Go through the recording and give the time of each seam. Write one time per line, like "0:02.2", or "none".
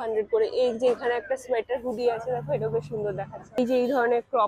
0:03.6